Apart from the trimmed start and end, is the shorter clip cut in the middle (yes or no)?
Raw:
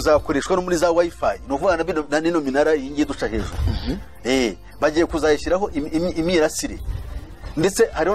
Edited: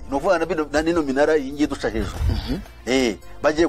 no